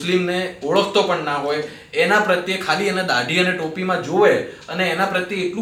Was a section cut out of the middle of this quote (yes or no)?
no